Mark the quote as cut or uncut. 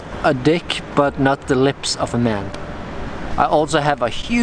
cut